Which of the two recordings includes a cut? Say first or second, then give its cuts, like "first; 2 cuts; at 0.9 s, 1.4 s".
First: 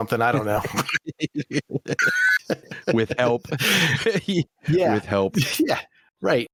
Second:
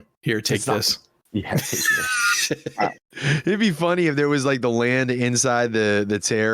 second; 1 cut; at 3.0 s